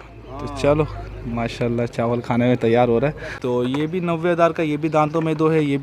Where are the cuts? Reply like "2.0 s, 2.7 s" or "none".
3.3 s